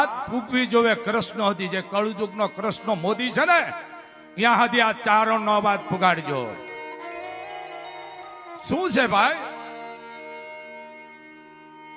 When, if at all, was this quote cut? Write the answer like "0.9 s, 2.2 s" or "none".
none